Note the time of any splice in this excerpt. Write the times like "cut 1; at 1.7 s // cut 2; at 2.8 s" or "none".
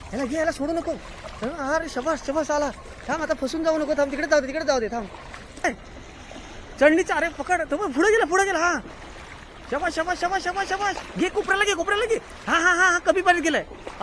cut 1; at 5.6 s

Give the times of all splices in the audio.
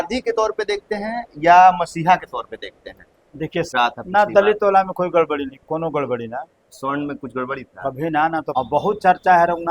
cut 1; at 3.7 s // cut 2; at 8.5 s

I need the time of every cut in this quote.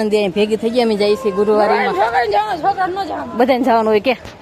none

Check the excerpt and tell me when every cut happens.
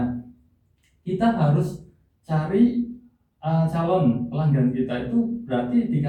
none

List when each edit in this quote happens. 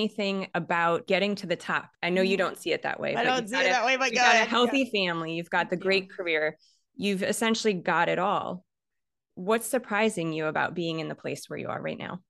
cut 1; at 1.0 s // cut 2; at 1.9 s

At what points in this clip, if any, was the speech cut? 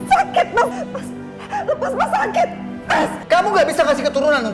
cut 1; at 3.2 s

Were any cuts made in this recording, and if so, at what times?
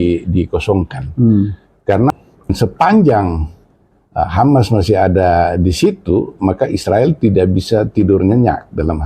cut 1; at 2.5 s

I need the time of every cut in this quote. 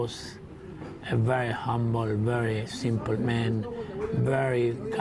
none

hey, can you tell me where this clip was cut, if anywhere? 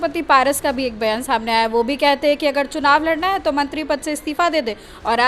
none

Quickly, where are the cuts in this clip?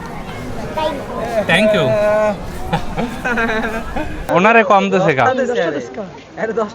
cut 1; at 4.2 s

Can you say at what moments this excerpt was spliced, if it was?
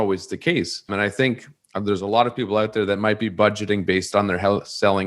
cut 1; at 0.9 s

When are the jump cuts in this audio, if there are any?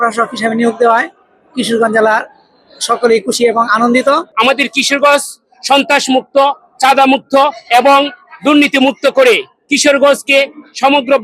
cut 1; at 4.3 s

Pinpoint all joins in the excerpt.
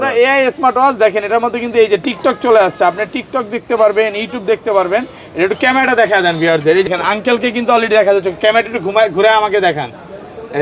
cut 1; at 6.9 s

